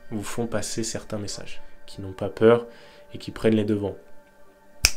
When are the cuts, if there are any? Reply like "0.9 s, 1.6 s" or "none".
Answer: 1.6 s